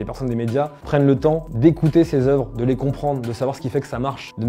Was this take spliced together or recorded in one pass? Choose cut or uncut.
uncut